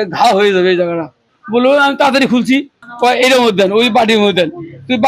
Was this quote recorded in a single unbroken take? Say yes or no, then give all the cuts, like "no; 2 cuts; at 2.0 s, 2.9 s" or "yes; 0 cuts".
no; 2 cuts; at 1.3 s, 2.8 s